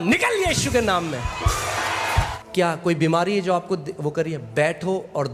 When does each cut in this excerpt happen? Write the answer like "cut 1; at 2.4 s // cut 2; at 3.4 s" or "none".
cut 1; at 2.3 s

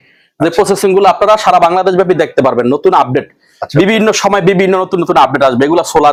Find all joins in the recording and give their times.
none

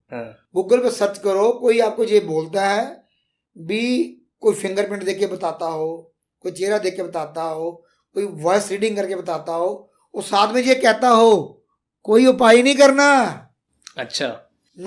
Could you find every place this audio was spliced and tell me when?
none

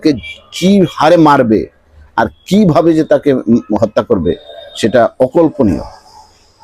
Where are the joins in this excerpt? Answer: none

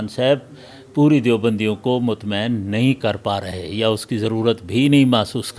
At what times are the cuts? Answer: none

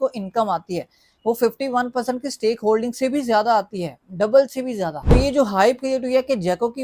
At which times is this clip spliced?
cut 1; at 5.1 s

